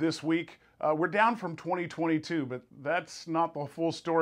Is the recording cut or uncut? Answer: cut